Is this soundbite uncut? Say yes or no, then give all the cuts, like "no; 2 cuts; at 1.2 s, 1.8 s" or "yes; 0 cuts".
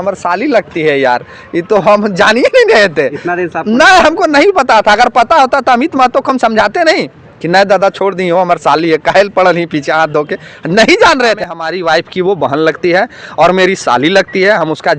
no; 1 cut; at 11.4 s